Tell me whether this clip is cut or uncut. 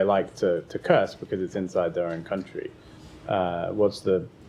uncut